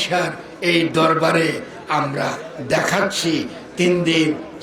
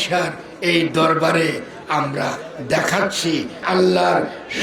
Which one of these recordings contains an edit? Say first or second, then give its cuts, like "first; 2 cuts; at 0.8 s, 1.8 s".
second; 1 cut; at 3.6 s